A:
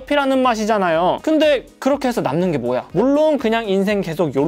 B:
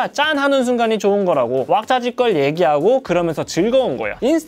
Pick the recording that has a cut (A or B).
A